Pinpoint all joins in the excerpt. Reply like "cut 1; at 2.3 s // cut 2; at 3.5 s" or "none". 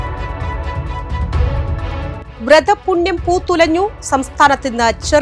none

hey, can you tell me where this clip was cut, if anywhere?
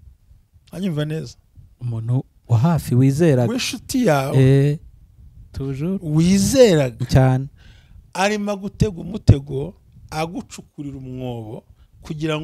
none

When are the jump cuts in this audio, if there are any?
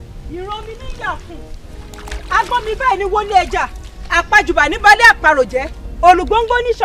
none

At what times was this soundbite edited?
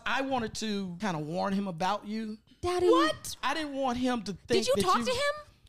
cut 1; at 0.9 s // cut 2; at 3.4 s

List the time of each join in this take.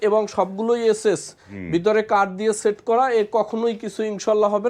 none

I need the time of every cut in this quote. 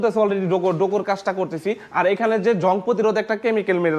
none

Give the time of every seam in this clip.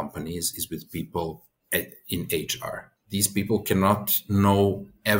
cut 1; at 1.5 s // cut 2; at 2.9 s

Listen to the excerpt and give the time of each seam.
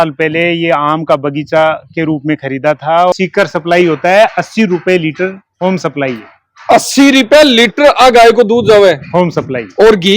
cut 1; at 3.1 s

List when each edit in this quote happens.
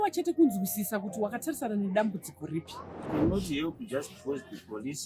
cut 1; at 3.1 s

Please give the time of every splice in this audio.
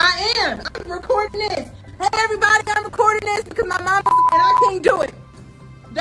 none

